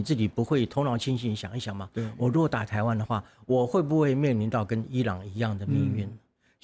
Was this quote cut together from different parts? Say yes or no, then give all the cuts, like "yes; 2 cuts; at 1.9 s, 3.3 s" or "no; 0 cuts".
no; 0 cuts